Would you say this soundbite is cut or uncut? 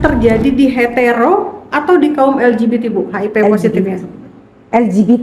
uncut